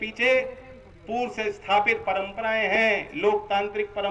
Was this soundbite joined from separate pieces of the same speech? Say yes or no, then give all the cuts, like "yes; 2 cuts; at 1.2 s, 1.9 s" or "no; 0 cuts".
no; 0 cuts